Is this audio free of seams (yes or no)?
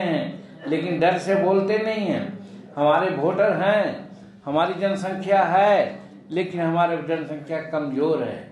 yes